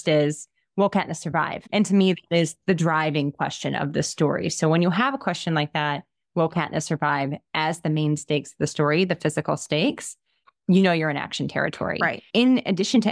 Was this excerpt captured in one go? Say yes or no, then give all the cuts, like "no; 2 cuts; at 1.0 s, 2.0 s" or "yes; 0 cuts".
no; 1 cut; at 1.6 s